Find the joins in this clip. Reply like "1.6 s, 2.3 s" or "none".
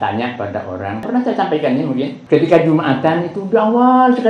1.0 s, 2.2 s